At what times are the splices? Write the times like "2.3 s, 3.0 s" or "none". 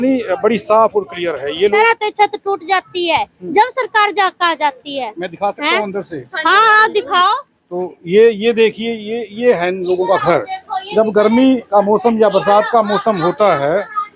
1.7 s

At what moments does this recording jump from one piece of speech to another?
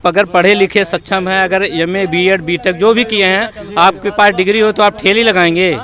none

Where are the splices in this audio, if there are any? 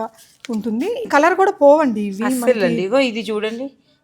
1.1 s

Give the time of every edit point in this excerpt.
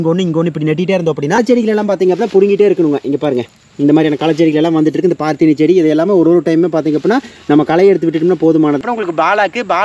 1.4 s, 8.8 s

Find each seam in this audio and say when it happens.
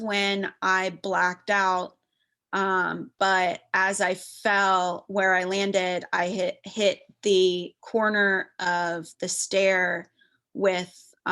none

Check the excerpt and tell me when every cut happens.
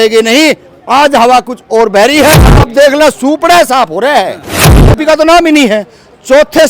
2.7 s, 5.0 s

